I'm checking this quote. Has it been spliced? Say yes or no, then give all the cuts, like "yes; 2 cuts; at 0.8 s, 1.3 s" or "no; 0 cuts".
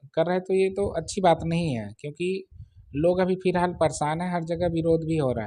no; 0 cuts